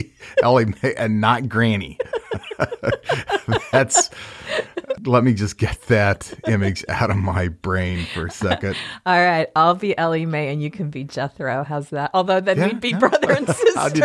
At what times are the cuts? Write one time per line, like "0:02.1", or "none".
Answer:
0:05.0